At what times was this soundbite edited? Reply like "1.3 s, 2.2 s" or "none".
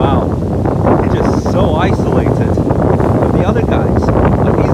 none